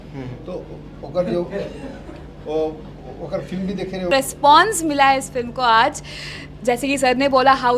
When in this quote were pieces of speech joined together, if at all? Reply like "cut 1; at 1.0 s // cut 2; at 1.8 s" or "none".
cut 1; at 4.1 s